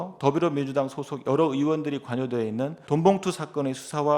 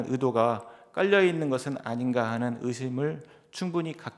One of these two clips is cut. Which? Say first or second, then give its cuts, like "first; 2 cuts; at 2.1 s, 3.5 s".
first; 1 cut; at 2.8 s